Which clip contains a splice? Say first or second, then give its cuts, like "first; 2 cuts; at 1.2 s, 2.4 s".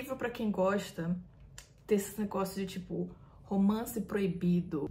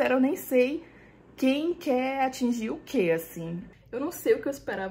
second; 1 cut; at 3.6 s